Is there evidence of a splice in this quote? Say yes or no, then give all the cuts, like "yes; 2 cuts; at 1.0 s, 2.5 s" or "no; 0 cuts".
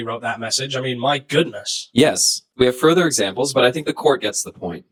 no; 0 cuts